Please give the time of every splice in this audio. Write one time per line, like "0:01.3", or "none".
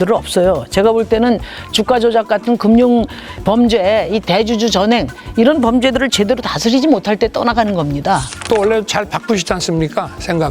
0:08.4